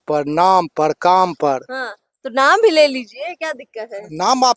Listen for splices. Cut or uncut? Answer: uncut